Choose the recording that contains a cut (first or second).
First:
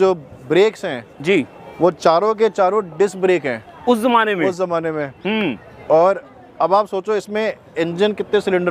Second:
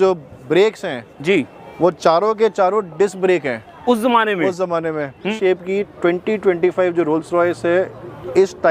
second